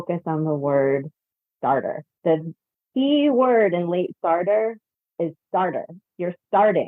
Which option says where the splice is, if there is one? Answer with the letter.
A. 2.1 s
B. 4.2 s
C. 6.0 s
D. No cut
A